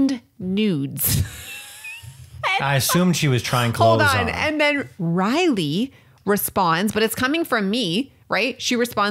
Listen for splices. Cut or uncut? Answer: uncut